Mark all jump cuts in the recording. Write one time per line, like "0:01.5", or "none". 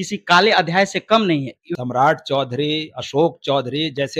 0:01.7